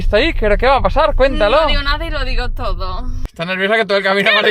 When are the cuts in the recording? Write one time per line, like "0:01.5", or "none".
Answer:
0:03.2